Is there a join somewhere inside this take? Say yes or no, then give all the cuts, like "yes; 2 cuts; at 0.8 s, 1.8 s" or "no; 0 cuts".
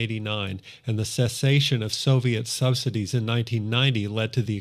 yes; 1 cut; at 2.4 s